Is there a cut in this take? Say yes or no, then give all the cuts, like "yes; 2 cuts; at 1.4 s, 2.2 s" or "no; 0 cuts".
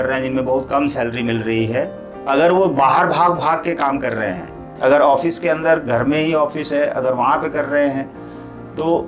yes; 2 cuts; at 2.1 s, 4.6 s